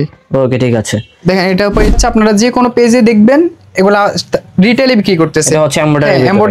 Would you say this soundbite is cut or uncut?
cut